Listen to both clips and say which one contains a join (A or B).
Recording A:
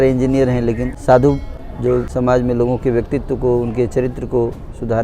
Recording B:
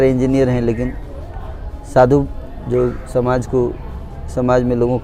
A